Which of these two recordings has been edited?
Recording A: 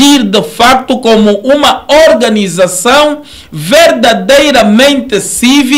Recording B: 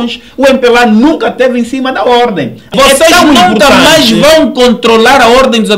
B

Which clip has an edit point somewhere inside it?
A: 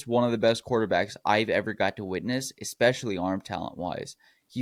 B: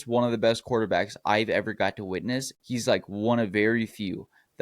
B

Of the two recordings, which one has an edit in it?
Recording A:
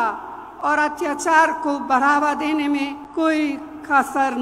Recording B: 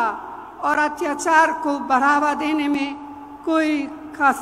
A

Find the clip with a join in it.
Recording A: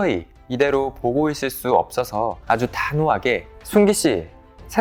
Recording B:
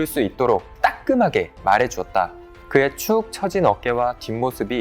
B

